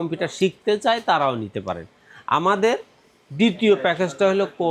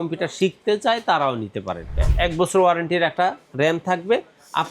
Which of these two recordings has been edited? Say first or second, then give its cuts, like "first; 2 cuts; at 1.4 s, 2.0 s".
second; 1 cut; at 2.1 s